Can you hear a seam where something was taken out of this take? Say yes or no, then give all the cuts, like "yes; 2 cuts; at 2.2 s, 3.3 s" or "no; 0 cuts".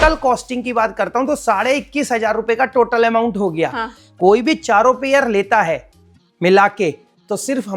no; 0 cuts